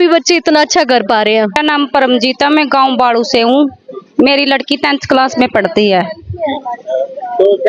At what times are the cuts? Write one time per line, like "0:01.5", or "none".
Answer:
none

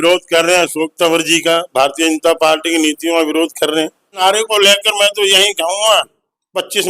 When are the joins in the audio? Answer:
0:04.2

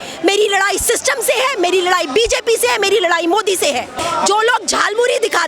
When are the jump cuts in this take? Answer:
0:03.9

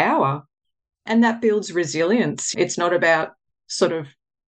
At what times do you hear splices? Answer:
0:01.0
0:02.5

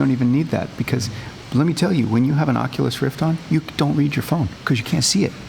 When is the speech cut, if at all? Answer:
0:04.6

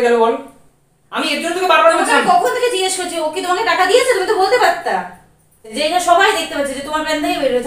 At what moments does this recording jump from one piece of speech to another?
0:05.7

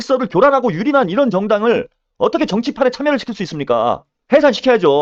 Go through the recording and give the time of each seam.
0:04.1

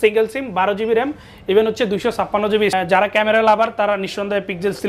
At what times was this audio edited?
0:02.7

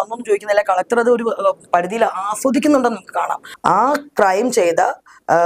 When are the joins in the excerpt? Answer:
0:03.4

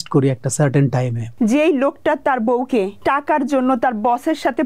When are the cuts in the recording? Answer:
0:01.2
0:02.9

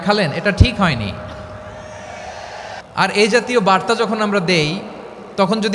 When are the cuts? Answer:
0:02.8

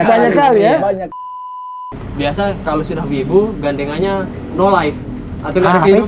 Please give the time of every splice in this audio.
0:01.6

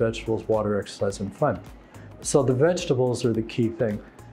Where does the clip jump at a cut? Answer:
none

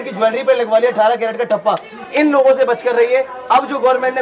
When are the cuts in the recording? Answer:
none

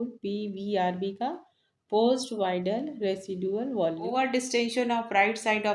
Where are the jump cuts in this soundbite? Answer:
0:04.1

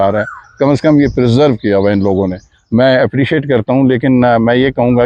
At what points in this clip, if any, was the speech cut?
none

